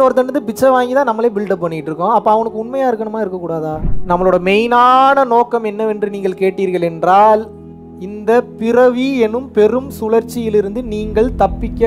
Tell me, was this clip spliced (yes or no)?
yes